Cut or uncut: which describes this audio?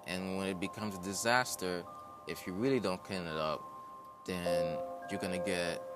cut